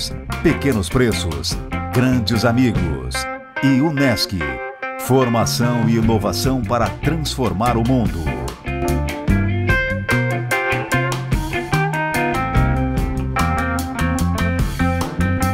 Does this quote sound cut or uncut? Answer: uncut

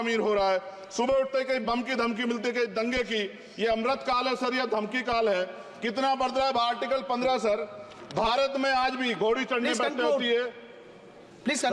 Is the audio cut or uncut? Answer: uncut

